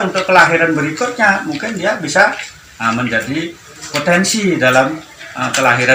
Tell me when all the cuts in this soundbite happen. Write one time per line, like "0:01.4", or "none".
none